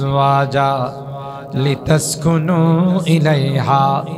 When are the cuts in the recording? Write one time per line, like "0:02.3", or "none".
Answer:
none